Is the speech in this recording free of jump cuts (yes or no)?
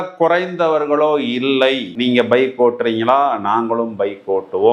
yes